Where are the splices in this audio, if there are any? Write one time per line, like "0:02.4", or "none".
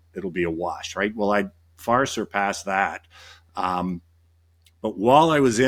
none